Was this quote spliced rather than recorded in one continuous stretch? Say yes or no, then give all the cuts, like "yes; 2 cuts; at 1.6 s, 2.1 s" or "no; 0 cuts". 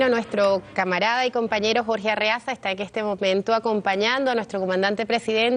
yes; 1 cut; at 1.6 s